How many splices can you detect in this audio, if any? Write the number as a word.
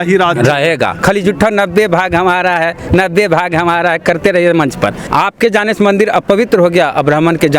two